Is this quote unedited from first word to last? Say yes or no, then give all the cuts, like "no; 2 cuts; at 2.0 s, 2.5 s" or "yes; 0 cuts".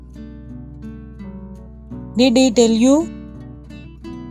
yes; 0 cuts